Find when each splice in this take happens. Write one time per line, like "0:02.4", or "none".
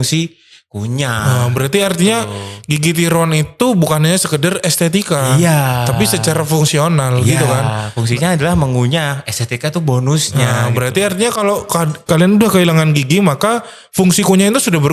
none